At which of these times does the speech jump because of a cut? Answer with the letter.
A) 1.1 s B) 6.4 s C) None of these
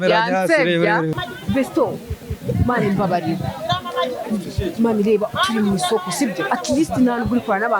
A